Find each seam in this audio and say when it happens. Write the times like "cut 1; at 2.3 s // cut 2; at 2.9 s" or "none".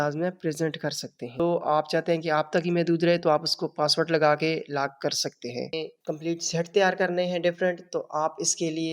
cut 1; at 1.4 s // cut 2; at 5.7 s

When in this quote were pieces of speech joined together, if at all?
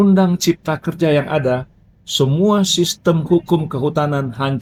none

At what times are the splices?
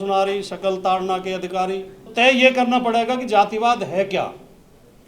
cut 1; at 2.1 s

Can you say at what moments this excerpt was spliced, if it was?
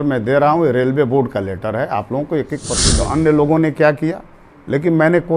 cut 1; at 2.9 s

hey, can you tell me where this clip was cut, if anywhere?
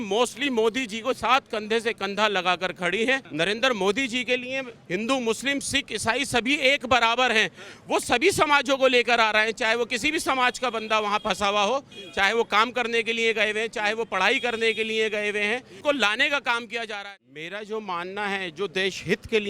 cut 1; at 3.3 s // cut 2; at 15.7 s // cut 3; at 16.9 s

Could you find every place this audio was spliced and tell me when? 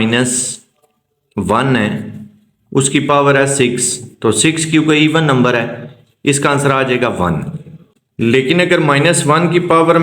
none

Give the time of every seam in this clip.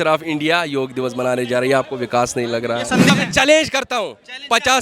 cut 1; at 3.1 s

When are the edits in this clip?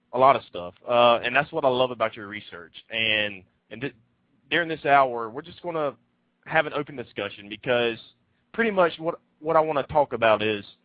none

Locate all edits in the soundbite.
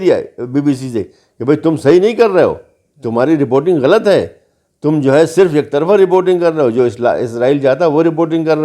none

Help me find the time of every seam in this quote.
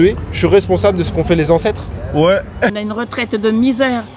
cut 1; at 2.8 s

